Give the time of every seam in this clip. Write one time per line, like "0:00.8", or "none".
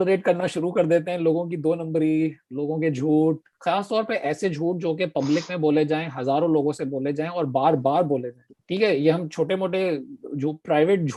none